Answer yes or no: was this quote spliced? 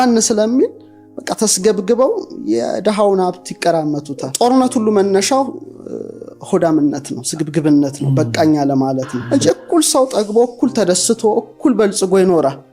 yes